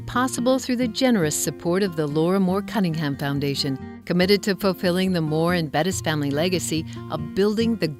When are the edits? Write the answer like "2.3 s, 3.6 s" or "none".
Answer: none